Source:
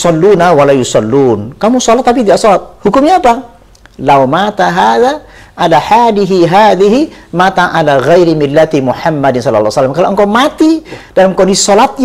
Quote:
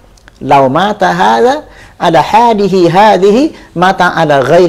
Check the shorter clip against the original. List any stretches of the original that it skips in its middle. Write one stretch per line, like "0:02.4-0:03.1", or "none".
none